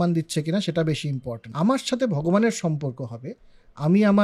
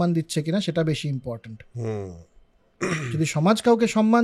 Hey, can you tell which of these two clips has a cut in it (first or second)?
first